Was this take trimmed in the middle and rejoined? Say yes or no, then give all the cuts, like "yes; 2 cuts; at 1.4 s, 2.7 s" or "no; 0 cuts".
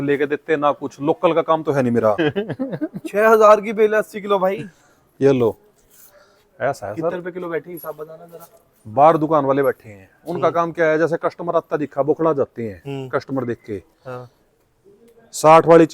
yes; 1 cut; at 2.2 s